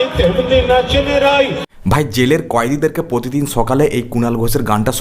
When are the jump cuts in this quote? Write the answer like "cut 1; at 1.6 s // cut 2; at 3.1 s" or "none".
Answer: cut 1; at 1.6 s